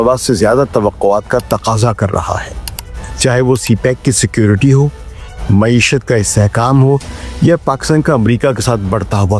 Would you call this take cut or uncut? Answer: uncut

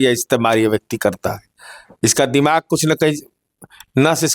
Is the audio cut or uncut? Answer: uncut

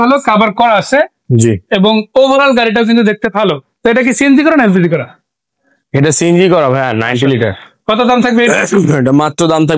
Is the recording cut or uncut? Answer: uncut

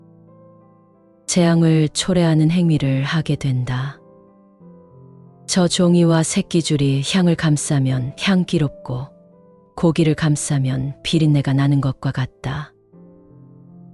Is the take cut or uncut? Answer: cut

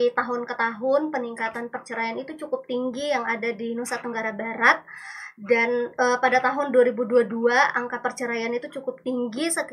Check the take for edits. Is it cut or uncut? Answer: uncut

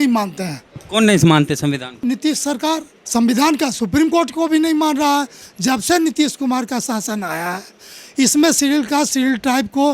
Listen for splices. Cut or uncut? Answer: cut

